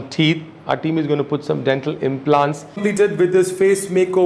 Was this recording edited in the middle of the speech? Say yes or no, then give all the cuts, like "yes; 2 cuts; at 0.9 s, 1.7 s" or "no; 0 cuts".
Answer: yes; 1 cut; at 2.7 s